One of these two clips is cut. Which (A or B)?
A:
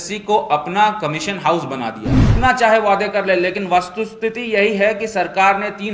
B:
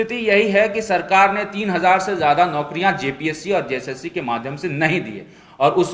A